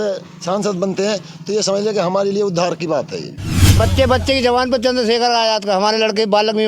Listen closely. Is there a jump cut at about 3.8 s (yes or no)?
yes